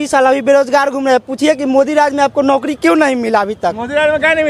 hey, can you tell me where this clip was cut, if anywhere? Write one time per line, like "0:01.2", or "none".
none

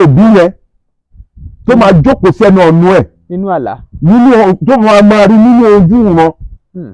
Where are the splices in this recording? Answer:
none

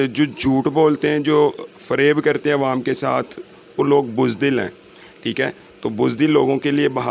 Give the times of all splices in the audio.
none

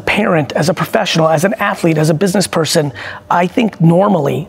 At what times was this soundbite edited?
none

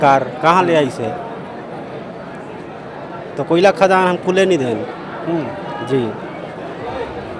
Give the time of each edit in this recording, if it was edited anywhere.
none

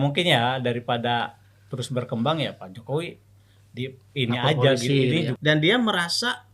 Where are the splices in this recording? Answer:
0:05.3

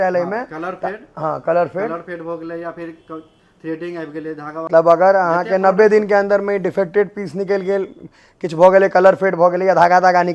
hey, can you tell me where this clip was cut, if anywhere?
0:04.7

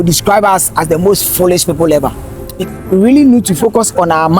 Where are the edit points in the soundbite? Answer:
0:02.6

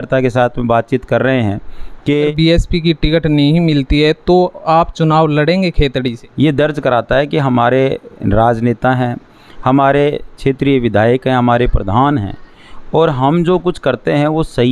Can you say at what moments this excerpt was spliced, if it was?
0:02.3
0:06.2

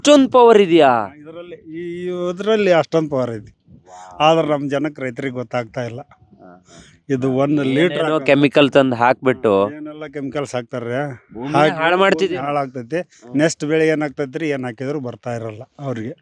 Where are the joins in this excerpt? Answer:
none

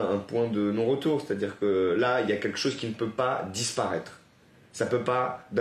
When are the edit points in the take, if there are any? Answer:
none

